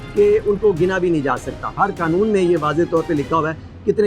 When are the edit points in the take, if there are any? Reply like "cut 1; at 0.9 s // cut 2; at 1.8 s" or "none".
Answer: cut 1; at 1.8 s